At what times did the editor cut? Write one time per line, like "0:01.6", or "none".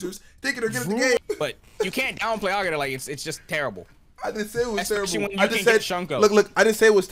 0:01.2